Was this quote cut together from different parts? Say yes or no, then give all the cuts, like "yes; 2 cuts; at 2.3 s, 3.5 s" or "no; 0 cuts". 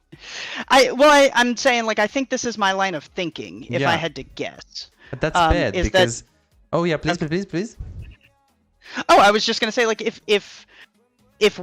no; 0 cuts